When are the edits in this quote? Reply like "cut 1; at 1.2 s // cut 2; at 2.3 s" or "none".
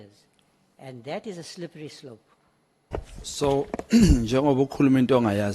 cut 1; at 2.9 s